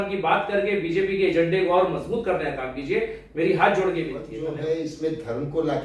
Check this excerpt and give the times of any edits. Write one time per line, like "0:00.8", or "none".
0:04.4